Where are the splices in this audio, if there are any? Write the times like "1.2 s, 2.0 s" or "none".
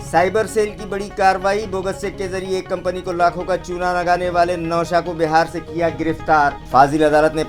none

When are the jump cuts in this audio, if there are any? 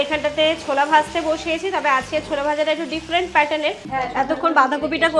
3.8 s

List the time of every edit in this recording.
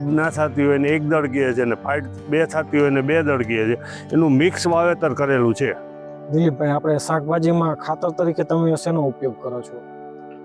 none

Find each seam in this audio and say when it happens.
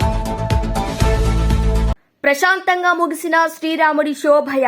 2.0 s

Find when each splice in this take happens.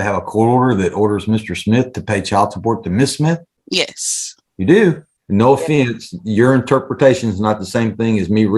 3.6 s, 5.1 s

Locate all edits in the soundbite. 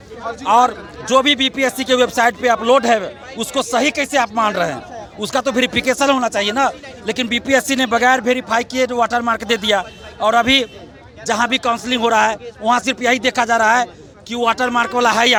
none

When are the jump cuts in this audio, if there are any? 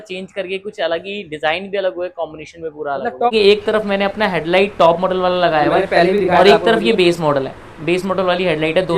3.3 s

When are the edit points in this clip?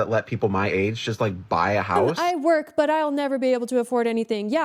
2.2 s

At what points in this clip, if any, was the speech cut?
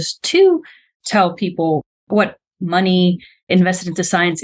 3.5 s

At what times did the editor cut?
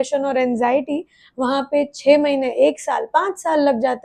none

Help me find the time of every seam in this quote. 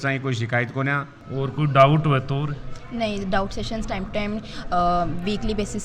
1.2 s

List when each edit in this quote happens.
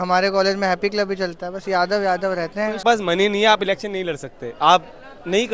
2.8 s

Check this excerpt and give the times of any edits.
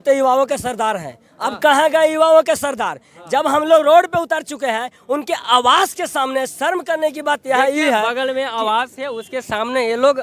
none

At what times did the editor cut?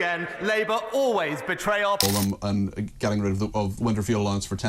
2.0 s

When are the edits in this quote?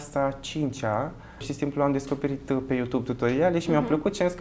1.5 s

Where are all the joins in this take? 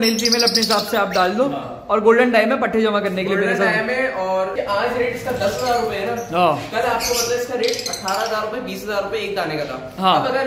4.5 s

